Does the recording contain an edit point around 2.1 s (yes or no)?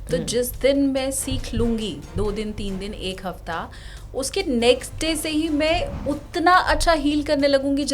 no